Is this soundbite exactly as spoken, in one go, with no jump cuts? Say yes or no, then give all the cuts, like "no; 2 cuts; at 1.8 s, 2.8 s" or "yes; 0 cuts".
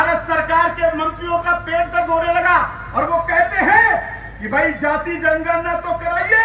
yes; 0 cuts